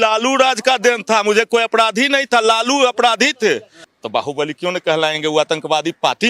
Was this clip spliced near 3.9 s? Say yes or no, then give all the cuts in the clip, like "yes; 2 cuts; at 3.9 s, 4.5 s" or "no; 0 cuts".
yes; 1 cut; at 3.9 s